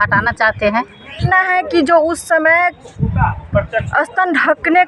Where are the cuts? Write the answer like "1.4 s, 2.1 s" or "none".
1.3 s